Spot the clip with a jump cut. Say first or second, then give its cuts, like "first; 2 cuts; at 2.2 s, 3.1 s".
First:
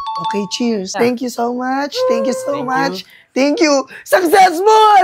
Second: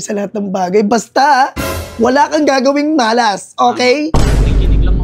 first; 1 cut; at 0.9 s